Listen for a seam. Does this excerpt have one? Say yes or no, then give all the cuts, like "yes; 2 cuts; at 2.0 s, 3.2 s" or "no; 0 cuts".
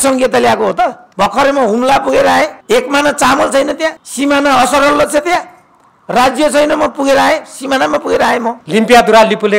yes; 4 cuts; at 1.0 s, 2.6 s, 4.0 s, 8.6 s